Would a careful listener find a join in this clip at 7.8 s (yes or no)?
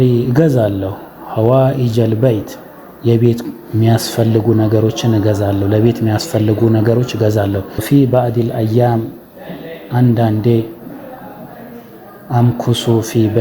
yes